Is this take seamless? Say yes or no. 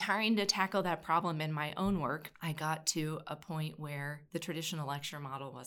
no